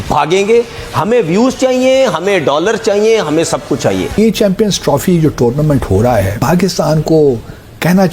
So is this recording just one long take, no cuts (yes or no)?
no